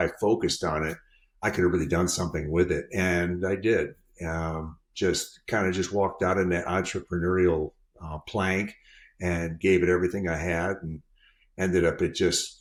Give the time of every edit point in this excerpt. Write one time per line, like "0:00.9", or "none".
none